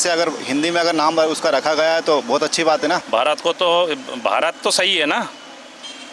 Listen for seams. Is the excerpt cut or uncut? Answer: cut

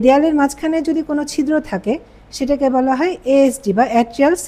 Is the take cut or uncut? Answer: uncut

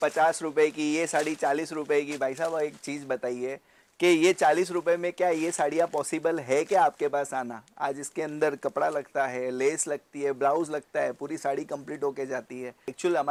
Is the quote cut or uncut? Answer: uncut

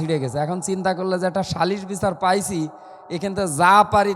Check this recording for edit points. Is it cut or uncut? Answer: uncut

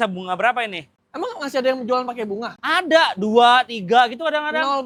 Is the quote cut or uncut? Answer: uncut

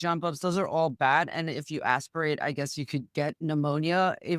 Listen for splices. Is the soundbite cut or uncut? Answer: cut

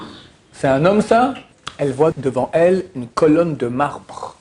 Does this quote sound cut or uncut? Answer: cut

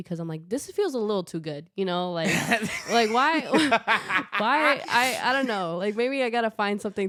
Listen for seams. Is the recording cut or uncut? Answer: uncut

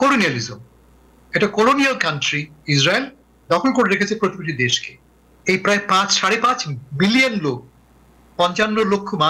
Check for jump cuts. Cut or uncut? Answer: cut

